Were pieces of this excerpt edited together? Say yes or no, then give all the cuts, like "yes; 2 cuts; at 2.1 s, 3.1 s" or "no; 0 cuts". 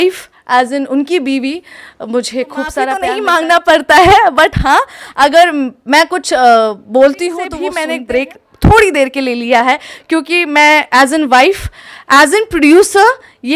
yes; 2 cuts; at 3.0 s, 7.8 s